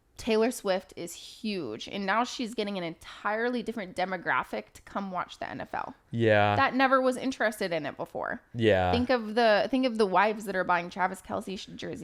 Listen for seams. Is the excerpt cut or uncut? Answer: uncut